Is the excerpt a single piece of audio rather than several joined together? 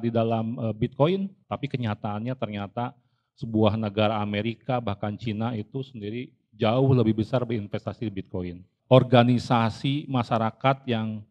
no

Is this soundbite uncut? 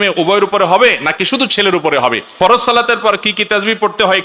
no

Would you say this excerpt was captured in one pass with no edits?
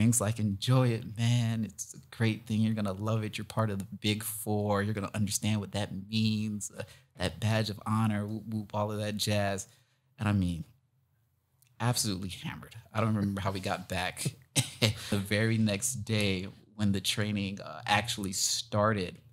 no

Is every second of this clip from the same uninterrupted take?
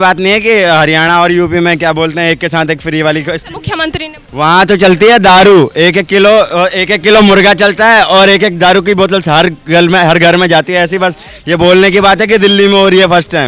yes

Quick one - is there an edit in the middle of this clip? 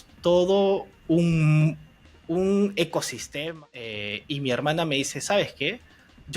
yes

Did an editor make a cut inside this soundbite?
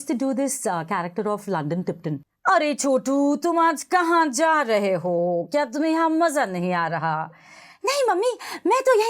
yes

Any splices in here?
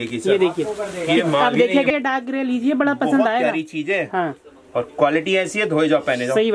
yes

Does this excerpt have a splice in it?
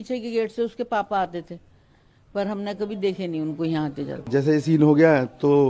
yes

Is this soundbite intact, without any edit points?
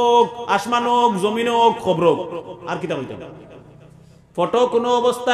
yes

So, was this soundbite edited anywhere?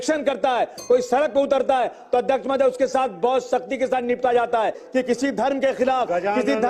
yes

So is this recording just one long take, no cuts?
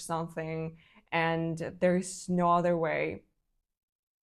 yes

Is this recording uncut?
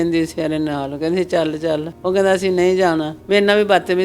no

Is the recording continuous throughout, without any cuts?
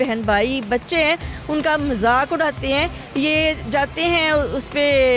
yes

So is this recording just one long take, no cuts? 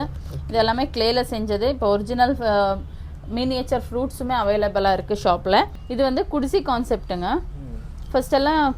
no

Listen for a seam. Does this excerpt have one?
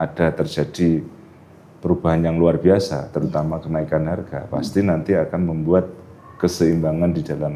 no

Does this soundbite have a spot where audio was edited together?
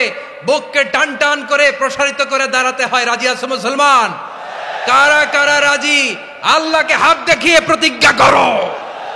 no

